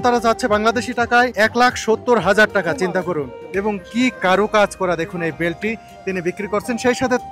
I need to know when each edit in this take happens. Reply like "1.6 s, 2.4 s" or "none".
1.3 s, 3.4 s